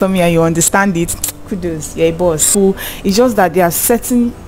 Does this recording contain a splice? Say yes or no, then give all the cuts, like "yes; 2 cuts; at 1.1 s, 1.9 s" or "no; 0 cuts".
yes; 1 cut; at 2.5 s